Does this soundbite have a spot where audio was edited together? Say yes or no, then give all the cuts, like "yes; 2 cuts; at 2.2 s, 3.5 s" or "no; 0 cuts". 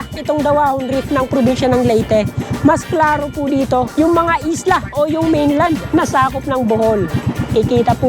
yes; 1 cut; at 5.8 s